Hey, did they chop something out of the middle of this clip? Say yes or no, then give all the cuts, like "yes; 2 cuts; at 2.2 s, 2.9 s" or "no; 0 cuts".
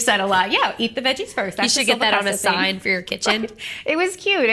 no; 0 cuts